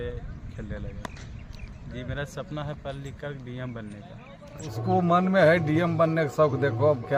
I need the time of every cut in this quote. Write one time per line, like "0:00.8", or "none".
0:04.7